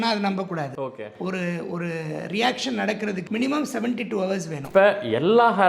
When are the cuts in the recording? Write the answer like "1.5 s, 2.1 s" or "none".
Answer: 3.2 s, 4.6 s